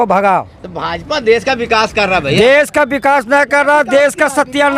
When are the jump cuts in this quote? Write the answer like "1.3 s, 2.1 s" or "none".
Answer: none